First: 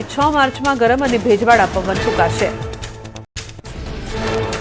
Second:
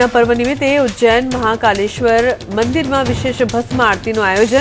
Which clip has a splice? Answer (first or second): first